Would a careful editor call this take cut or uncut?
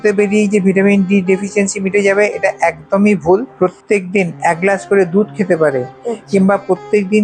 cut